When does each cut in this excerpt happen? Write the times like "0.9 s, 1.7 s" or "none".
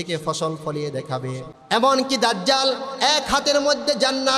1.5 s